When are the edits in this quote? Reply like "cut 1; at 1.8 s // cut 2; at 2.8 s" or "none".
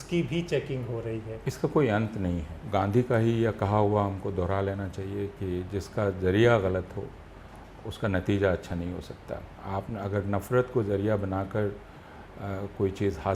cut 1; at 1.3 s // cut 2; at 2.5 s // cut 3; at 9.5 s

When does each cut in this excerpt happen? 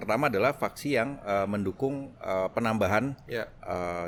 none

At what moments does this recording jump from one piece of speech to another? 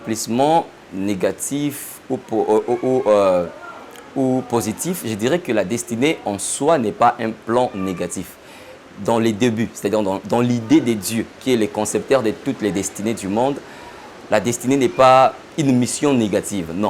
none

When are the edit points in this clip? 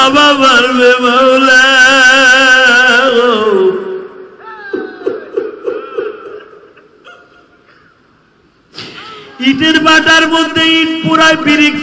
none

